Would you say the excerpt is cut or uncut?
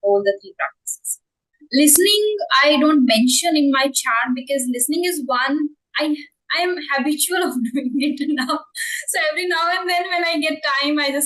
uncut